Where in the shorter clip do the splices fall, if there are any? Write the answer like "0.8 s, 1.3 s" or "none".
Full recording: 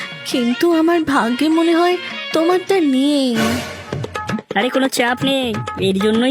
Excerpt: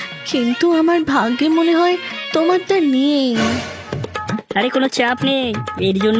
none